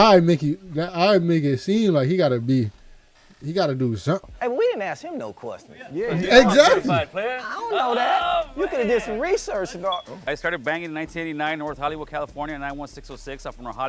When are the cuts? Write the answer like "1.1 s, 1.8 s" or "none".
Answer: 4.3 s, 10.2 s